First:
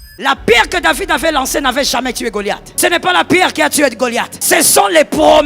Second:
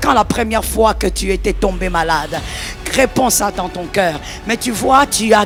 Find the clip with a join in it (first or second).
first